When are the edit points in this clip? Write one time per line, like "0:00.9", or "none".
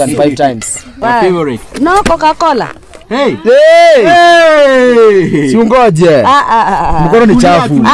0:01.0